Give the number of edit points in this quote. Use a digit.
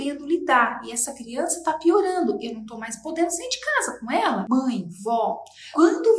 1